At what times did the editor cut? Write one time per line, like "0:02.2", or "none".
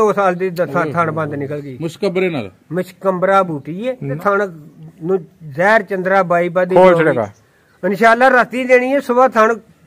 0:04.1